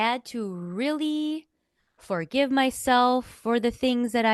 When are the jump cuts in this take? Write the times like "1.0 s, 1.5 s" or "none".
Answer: none